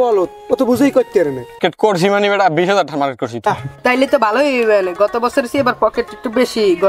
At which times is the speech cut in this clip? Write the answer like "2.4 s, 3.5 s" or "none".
1.6 s, 3.5 s